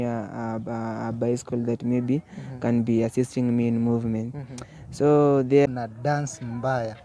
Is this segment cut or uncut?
cut